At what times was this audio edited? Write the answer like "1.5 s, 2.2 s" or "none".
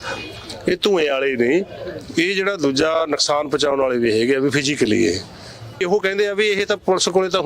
5.8 s